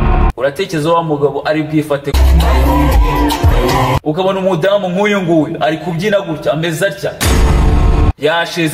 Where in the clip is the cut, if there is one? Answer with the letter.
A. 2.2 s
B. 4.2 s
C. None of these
A